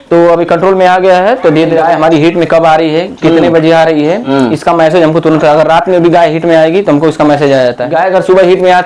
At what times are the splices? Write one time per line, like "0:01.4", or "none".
0:01.8
0:07.8